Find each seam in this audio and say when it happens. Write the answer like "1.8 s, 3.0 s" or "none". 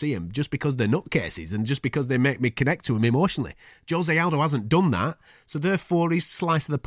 none